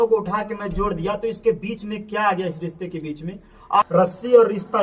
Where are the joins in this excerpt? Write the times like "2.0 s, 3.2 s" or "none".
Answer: 3.9 s